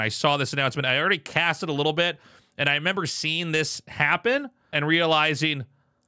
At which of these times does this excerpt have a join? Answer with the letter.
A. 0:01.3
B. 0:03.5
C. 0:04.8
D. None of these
C